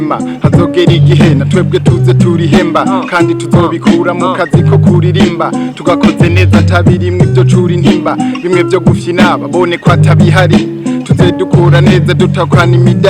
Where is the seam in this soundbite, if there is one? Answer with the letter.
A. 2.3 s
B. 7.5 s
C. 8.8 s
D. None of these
D